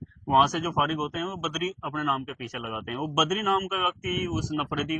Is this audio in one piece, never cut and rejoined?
yes; 0 cuts

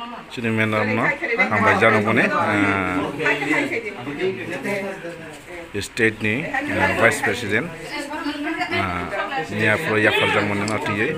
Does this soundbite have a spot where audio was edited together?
no; 0 cuts

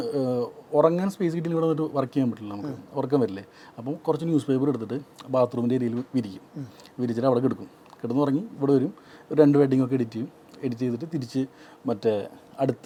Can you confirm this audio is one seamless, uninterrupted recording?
yes; 0 cuts

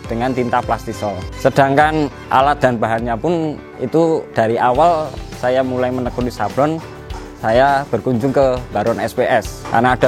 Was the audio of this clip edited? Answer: yes; 2 cuts; at 1.3 s, 4.3 s

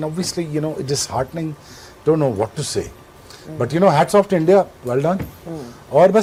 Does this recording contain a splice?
no; 0 cuts

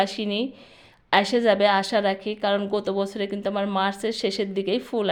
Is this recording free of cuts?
yes; 0 cuts

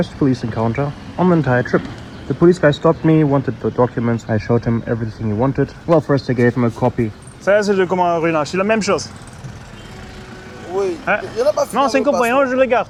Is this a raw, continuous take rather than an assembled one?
yes; 0 cuts

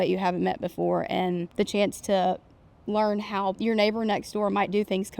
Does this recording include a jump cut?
yes; 2 cuts; at 1.5 s, 3.6 s

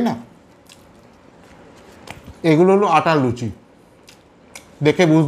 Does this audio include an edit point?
yes; 1 cut; at 2.3 s

